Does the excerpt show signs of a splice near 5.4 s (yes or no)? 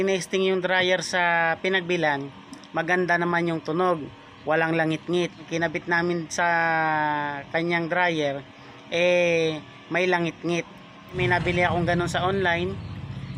yes